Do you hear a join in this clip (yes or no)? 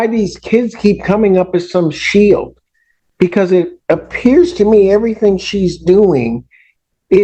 no